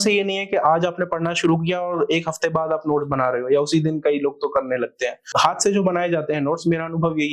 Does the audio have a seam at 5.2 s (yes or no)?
yes